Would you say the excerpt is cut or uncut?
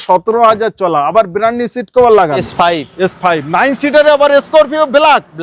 cut